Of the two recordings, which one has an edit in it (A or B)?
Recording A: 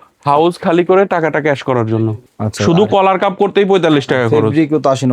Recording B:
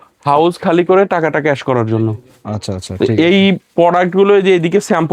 A